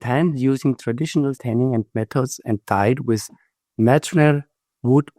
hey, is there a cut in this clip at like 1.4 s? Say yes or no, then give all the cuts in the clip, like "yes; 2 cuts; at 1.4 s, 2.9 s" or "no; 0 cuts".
yes; 1 cut; at 1.4 s